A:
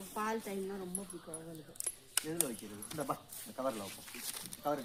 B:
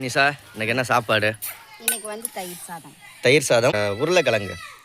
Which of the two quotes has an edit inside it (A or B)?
B